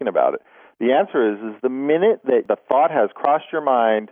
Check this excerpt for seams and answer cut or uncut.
cut